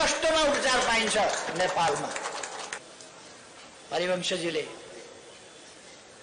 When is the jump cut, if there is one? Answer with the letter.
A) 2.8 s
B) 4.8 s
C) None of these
A